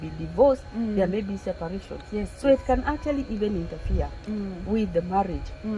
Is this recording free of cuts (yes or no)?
yes